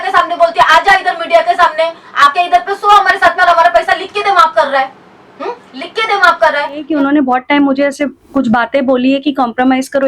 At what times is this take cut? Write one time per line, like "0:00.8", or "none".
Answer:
0:06.9